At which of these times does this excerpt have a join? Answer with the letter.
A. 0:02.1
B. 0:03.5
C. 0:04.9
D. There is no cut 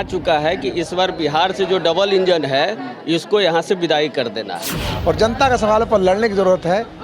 C